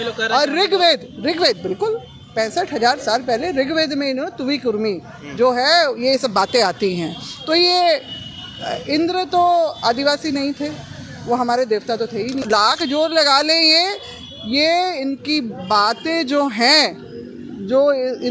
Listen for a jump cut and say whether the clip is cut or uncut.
cut